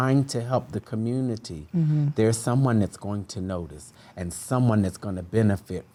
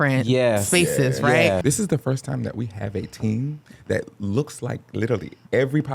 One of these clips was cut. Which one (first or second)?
second